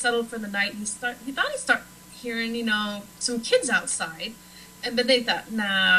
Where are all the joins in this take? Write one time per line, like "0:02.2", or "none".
0:01.9